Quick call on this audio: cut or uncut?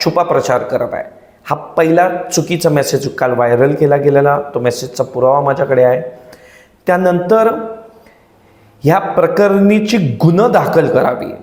uncut